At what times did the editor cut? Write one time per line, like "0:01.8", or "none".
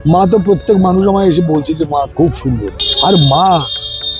none